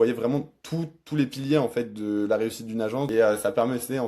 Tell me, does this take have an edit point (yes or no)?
yes